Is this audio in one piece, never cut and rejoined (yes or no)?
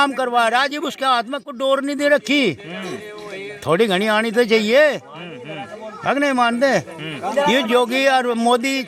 yes